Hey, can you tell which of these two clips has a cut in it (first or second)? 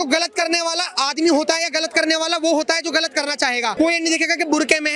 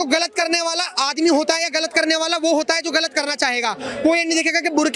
first